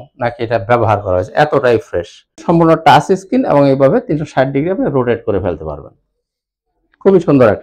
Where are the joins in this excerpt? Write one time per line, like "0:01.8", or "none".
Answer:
0:02.4